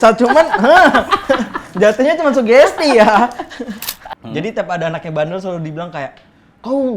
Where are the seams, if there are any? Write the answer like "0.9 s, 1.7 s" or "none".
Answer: 3.9 s

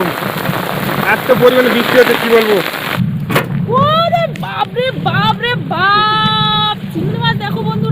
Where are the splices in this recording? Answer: 2.9 s

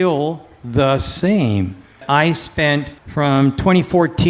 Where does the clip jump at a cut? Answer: 2.0 s, 3.0 s

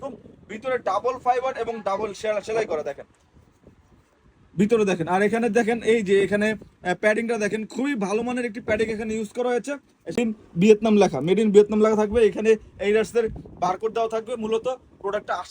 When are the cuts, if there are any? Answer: 10.2 s

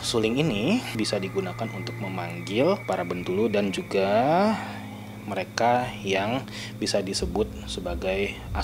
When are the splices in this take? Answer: 0.9 s, 2.8 s

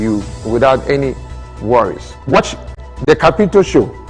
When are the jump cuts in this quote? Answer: 2.4 s

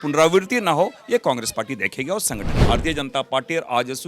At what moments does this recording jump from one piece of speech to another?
2.6 s

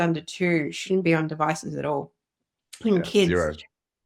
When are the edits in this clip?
none

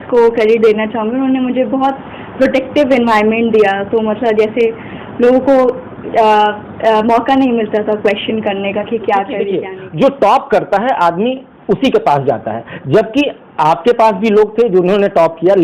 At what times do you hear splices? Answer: 9.6 s

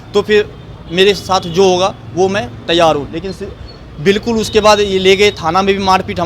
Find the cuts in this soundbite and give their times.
none

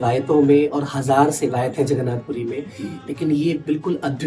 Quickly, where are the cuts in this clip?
none

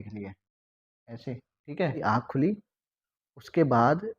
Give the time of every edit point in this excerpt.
2.0 s

